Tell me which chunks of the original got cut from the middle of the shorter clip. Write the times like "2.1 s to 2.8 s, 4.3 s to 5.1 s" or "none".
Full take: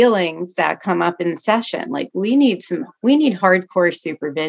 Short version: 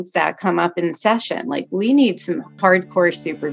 3.0 s to 3.4 s